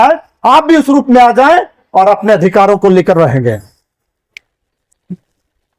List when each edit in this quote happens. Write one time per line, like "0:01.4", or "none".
none